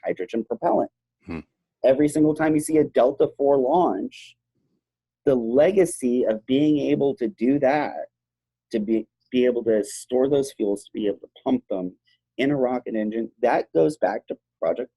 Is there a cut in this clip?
no; 0 cuts

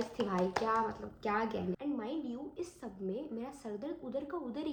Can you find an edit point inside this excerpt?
no; 0 cuts

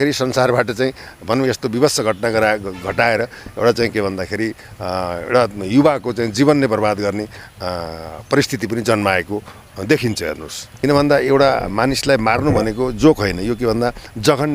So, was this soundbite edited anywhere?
yes; 1 cut; at 10.6 s

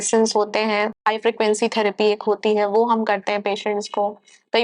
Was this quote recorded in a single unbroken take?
no; 1 cut; at 0.9 s

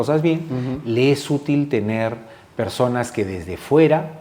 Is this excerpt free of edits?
yes; 0 cuts

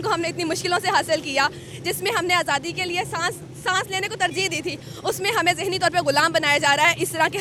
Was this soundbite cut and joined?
no; 0 cuts

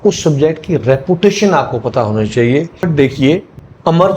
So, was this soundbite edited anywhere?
yes; 1 cut; at 2.8 s

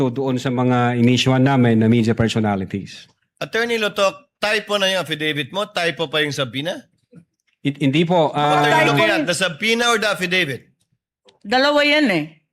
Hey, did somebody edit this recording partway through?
no; 0 cuts

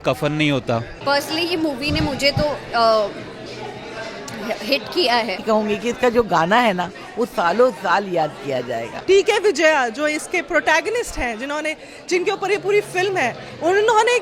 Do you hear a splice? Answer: yes; 3 cuts; at 0.9 s, 5.4 s, 8.9 s

